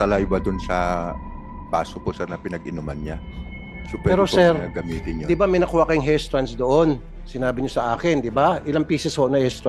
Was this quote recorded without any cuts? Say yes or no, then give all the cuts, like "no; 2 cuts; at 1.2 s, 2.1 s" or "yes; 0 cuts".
yes; 0 cuts